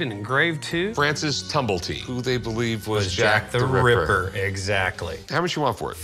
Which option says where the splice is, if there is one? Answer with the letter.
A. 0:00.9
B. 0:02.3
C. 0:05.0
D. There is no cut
A